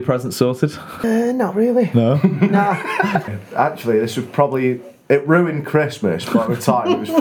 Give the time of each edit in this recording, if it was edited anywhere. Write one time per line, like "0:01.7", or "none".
0:01.0
0:03.2